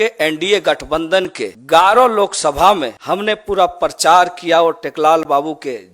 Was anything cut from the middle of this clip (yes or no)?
yes